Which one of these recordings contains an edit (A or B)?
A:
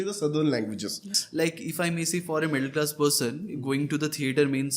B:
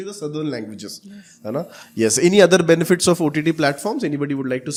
A